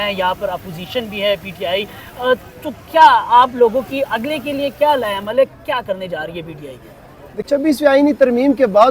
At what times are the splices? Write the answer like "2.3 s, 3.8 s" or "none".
7.5 s